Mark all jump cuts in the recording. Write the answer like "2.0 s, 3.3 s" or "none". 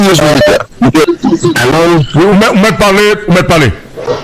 1.1 s